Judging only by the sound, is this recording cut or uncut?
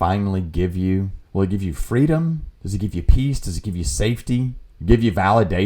cut